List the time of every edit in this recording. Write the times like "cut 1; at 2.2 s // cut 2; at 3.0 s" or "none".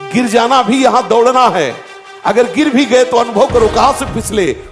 none